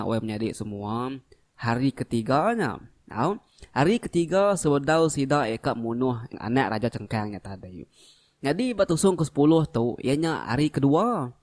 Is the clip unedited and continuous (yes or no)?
no